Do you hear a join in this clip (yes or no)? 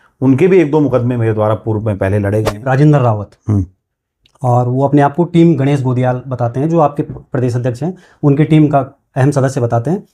yes